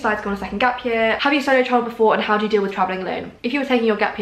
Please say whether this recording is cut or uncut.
cut